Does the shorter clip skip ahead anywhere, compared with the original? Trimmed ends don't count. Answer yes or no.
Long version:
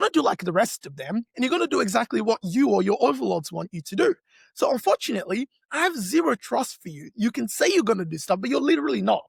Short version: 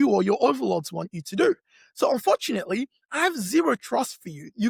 no